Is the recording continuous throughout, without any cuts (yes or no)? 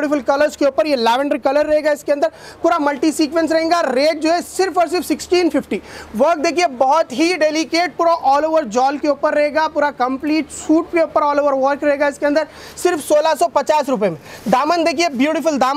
yes